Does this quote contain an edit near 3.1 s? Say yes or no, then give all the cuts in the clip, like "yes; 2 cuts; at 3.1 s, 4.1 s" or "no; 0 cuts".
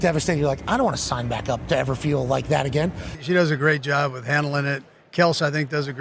yes; 1 cut; at 3.1 s